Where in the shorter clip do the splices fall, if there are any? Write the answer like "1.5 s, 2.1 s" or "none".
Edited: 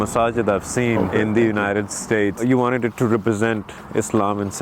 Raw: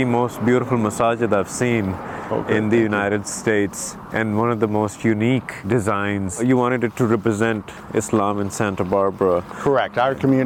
1.0 s, 2.4 s